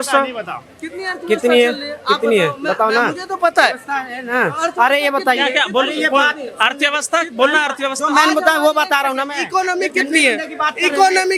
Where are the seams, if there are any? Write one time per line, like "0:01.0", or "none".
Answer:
none

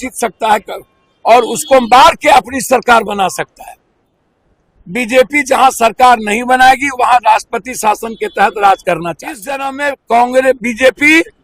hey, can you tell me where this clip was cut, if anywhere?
0:09.7

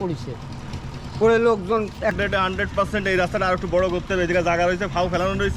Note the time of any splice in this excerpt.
0:02.2

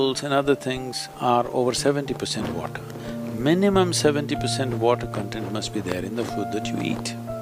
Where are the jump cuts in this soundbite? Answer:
none

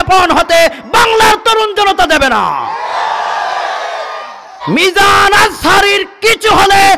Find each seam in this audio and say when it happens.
0:04.5

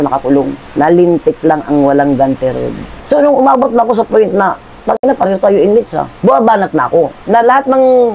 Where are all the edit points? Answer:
0:02.9

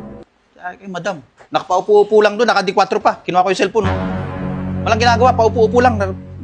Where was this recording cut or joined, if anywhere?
0:01.3

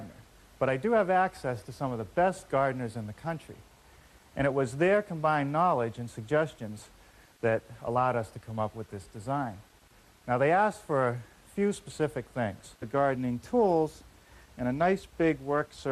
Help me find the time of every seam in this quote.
none

